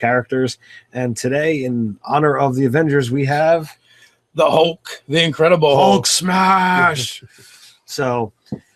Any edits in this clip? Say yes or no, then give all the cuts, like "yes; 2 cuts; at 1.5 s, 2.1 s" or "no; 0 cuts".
no; 0 cuts